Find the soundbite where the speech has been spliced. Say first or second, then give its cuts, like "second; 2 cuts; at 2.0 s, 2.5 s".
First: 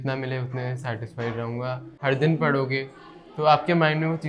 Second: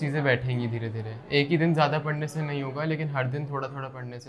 first; 1 cut; at 1.9 s